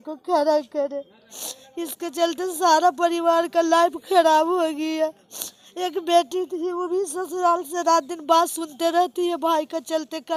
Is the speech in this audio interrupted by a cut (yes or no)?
no